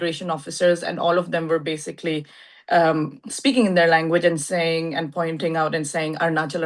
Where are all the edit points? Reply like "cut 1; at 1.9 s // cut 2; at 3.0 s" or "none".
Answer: none